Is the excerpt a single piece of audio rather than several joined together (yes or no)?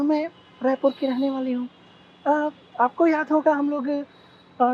yes